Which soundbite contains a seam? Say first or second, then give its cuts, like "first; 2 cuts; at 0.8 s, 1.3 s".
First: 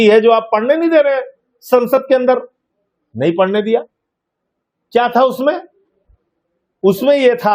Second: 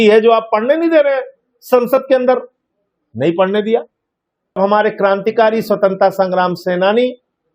second; 1 cut; at 4.6 s